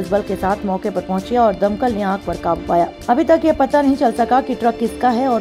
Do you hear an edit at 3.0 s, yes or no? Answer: yes